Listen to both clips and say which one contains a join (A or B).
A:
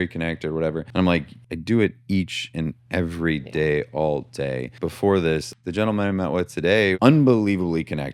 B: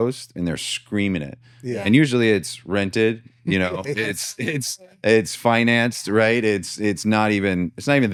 A